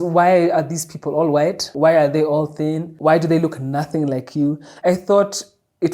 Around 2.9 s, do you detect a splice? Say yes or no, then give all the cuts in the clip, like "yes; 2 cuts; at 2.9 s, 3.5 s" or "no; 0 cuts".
yes; 3 cuts; at 1.7 s, 2.9 s, 4.7 s